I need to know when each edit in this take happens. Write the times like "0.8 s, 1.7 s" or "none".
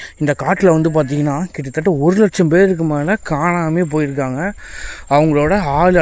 none